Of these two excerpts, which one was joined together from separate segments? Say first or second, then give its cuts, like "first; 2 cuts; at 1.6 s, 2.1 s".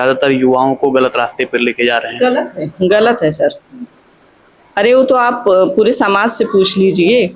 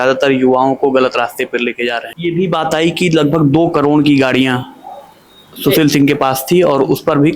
second; 1 cut; at 2.1 s